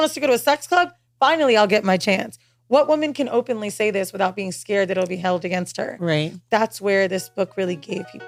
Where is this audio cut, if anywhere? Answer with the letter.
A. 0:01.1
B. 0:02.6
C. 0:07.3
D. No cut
D